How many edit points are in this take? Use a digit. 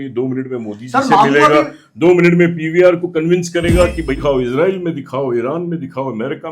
1